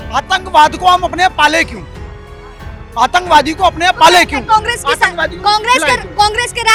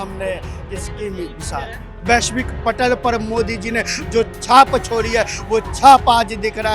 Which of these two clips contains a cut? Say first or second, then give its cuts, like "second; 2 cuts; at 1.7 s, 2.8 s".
second; 1 cut; at 1.9 s